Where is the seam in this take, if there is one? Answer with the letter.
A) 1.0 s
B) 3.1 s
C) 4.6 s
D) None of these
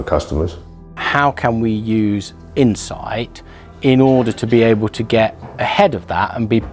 A